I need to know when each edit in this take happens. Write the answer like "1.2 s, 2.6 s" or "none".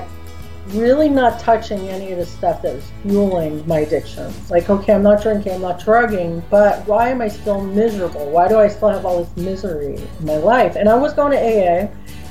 4.3 s